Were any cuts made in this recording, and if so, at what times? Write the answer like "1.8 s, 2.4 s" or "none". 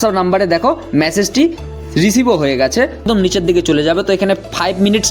3.0 s